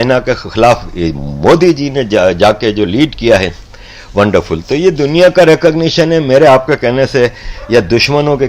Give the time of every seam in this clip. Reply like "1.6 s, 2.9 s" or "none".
none